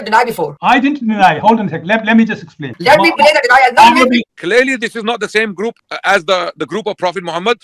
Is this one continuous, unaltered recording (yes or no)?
no